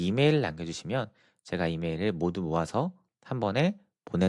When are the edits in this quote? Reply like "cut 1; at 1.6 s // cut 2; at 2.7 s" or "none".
none